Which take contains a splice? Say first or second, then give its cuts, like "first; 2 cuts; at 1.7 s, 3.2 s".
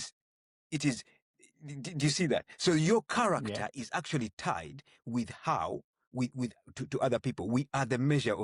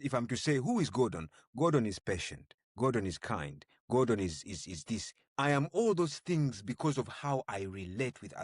second; 1 cut; at 5.2 s